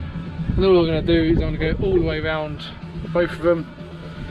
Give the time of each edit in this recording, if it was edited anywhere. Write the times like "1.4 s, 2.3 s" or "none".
none

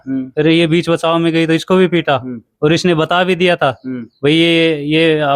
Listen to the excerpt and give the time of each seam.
none

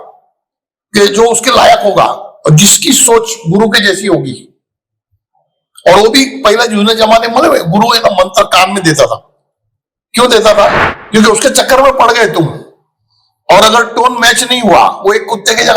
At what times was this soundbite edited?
10.8 s

